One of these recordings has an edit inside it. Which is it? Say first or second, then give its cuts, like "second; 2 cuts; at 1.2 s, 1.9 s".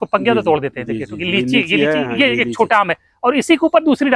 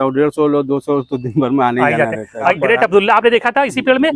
second; 1 cut; at 2.5 s